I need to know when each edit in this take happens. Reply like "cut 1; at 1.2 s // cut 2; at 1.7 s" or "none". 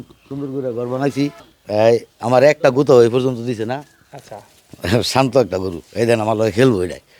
cut 1; at 1.4 s